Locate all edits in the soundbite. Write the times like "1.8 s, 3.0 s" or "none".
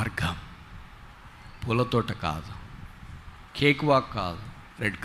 none